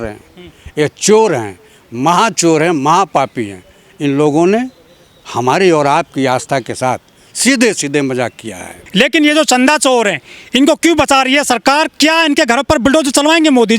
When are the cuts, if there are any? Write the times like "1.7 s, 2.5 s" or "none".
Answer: none